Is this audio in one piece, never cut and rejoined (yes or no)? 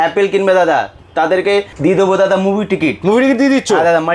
yes